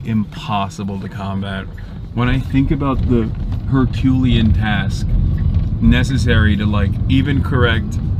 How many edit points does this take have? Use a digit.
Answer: 0